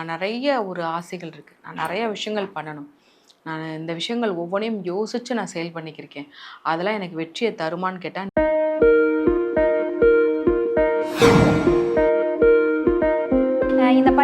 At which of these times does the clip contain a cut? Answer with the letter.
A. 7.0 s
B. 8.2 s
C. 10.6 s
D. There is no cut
B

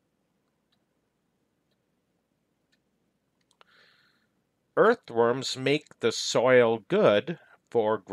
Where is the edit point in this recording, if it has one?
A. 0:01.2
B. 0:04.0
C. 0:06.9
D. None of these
D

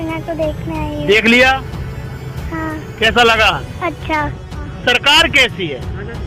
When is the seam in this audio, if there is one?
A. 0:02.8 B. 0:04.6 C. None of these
B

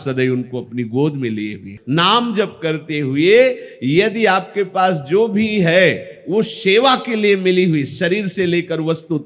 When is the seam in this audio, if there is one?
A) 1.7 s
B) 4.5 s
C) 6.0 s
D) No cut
A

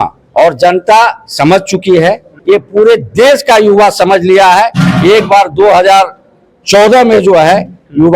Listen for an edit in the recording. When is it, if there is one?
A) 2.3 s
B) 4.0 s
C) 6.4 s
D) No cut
A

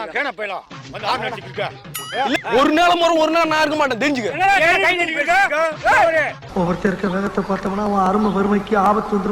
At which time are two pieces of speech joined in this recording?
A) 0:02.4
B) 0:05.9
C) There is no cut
A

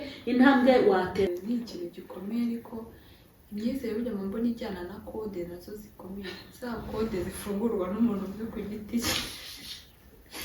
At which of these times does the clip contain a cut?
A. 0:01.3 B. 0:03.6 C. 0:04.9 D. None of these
A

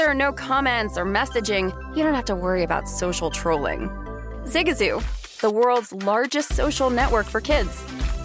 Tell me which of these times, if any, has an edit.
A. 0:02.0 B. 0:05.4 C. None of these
C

